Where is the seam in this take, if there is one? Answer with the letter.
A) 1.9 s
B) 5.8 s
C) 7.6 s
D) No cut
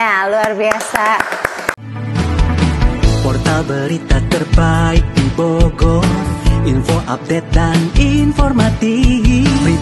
A